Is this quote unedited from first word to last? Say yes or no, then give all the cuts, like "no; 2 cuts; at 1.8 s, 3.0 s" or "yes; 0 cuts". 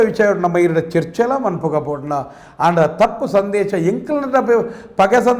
yes; 0 cuts